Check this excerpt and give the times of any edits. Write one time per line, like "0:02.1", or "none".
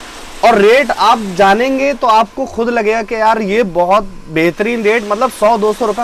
none